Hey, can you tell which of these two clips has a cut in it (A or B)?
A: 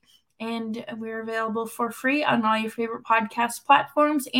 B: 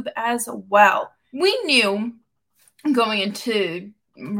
B